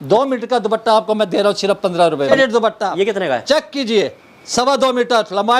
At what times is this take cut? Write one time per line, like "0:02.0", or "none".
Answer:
0:02.3